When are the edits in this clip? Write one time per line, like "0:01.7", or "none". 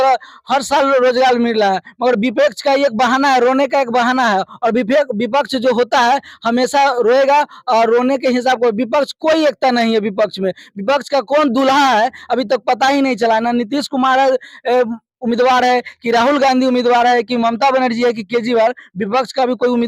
none